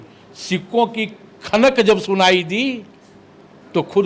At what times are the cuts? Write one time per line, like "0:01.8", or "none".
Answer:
none